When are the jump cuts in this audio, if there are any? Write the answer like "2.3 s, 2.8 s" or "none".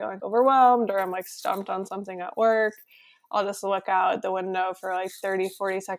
none